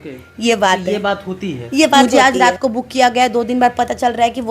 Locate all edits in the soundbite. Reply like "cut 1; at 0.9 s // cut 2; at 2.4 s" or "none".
cut 1; at 2.0 s